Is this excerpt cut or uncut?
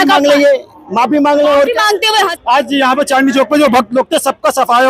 cut